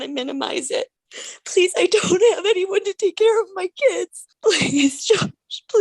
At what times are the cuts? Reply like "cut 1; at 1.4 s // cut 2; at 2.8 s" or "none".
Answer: cut 1; at 1.0 s // cut 2; at 4.2 s

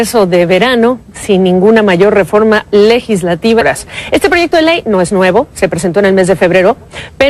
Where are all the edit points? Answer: none

